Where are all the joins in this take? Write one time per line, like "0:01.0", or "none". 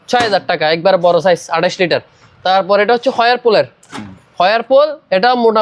none